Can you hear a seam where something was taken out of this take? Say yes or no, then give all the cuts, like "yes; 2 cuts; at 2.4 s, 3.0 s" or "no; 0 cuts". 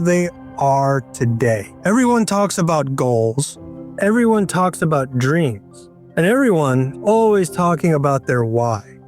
yes; 2 cuts; at 1.7 s, 7.0 s